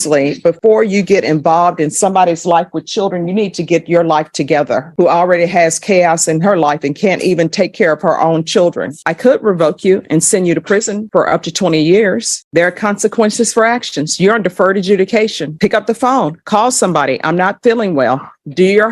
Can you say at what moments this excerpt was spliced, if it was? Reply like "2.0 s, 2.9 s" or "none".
4.9 s, 9.0 s, 12.4 s